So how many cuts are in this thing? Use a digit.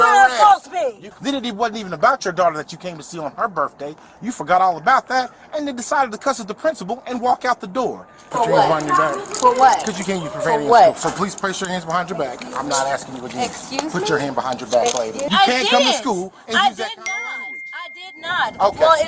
3